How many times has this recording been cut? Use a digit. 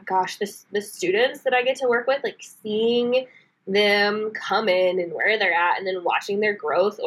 0